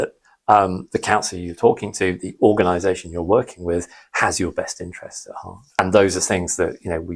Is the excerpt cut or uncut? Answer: cut